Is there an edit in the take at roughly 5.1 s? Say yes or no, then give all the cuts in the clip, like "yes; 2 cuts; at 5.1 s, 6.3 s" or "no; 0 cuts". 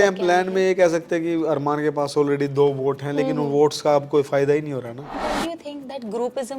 yes; 1 cut; at 5.1 s